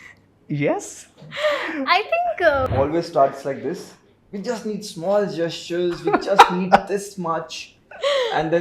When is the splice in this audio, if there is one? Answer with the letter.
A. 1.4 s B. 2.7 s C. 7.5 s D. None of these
B